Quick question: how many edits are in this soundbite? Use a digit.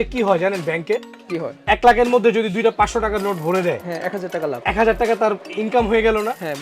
1